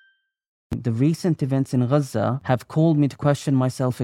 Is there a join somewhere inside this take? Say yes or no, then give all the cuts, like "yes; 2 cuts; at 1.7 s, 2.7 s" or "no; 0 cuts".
yes; 2 cuts; at 0.8 s, 2.4 s